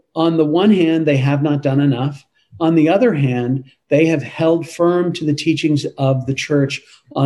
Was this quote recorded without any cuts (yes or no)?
yes